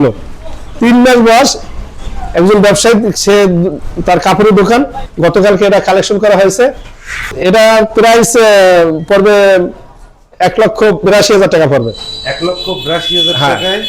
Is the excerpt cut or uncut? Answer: cut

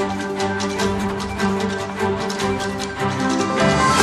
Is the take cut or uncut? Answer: uncut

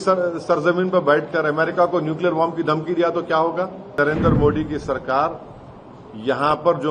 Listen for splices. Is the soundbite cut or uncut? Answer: cut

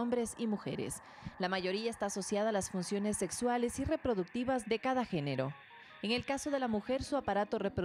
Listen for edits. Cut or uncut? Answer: uncut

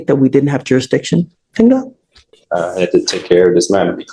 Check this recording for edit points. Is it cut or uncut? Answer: uncut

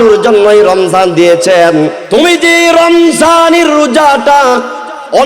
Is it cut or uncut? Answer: cut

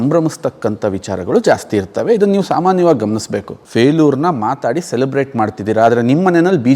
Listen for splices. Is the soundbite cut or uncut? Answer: cut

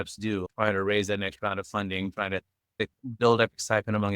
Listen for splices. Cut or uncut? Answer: cut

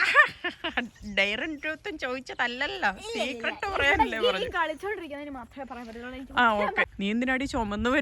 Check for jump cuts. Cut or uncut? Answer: cut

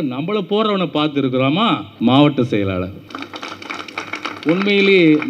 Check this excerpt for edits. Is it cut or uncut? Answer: cut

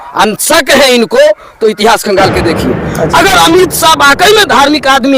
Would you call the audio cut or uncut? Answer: cut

